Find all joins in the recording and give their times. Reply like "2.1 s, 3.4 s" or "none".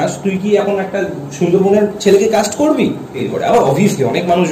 3.2 s